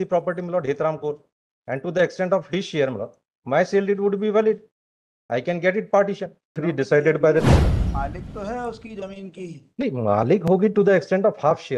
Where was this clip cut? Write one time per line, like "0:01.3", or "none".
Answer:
0:06.5